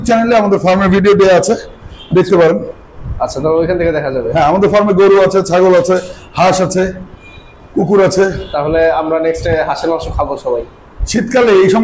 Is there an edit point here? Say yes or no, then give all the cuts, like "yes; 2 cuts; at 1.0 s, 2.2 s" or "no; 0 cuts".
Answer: no; 0 cuts